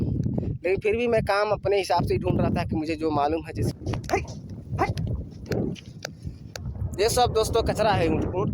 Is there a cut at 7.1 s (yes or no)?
no